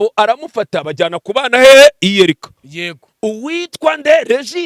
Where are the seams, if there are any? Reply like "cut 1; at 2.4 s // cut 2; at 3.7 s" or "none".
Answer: cut 1; at 3.0 s